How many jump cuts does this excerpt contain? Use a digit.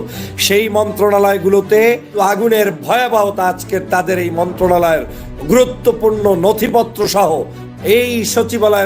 1